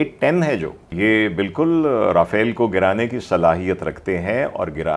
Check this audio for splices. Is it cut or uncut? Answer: cut